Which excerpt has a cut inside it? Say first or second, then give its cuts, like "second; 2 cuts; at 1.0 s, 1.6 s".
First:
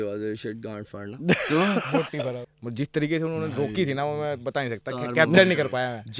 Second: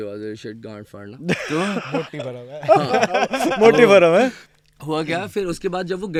first; 1 cut; at 2.5 s